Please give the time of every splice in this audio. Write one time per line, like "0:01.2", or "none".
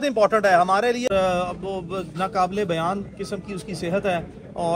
0:01.1